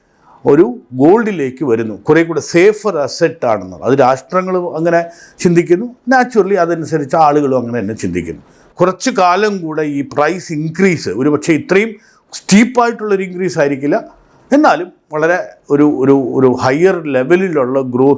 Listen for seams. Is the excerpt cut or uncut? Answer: cut